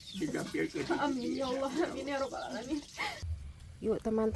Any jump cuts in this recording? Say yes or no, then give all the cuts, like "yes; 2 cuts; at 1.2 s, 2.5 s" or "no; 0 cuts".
yes; 1 cut; at 3.3 s